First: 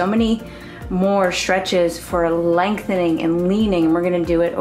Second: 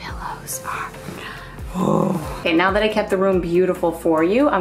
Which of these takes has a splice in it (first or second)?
second